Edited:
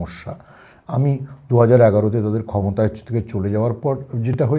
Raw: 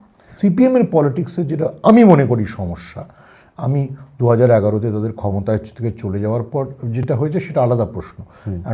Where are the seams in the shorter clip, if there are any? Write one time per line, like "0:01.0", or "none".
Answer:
none